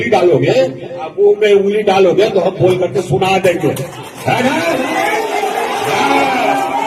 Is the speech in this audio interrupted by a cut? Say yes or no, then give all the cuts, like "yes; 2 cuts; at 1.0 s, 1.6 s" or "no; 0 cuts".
no; 0 cuts